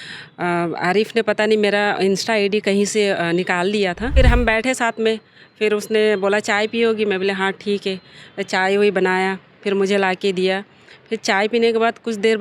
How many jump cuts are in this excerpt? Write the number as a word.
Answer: one